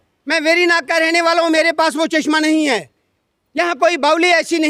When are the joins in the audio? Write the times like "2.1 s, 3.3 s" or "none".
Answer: none

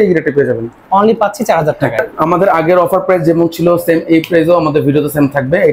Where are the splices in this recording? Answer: 2.1 s

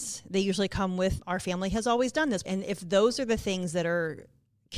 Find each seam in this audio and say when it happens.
1.2 s

